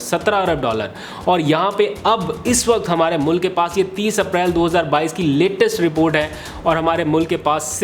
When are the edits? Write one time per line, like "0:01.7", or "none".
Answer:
none